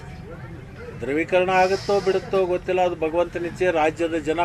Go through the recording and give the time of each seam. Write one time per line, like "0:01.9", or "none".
none